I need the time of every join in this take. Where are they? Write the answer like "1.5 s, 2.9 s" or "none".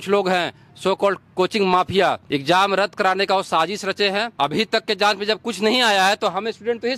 2.2 s, 4.3 s